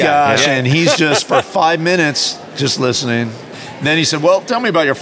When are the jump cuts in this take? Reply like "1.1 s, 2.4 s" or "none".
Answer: 3.5 s